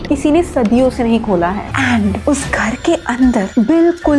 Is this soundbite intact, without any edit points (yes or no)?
no